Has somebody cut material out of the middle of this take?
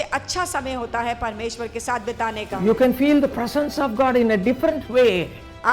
yes; 1 cut; at 2.3 s

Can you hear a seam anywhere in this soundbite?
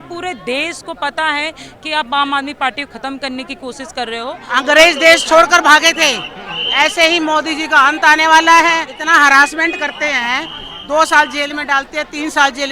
yes; 2 cuts; at 4.4 s, 8.9 s

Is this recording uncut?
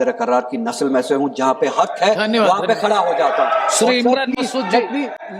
yes; 0 cuts

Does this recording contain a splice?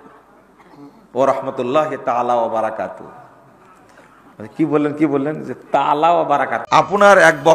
yes; 1 cut; at 6.6 s

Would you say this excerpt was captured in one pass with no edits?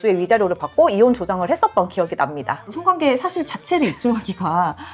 no; 1 cut; at 2.7 s

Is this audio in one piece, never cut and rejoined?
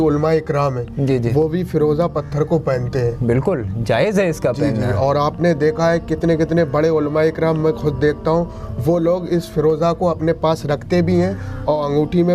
yes; 0 cuts

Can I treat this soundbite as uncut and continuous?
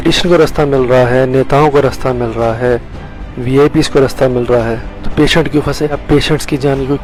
yes; 0 cuts

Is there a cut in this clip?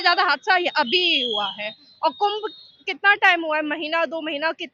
no; 0 cuts

